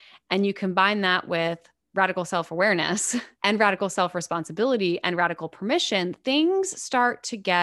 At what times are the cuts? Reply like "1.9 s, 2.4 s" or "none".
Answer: 3.3 s